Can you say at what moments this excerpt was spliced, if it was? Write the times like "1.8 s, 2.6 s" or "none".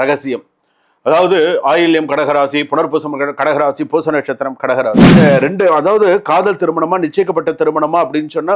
5.0 s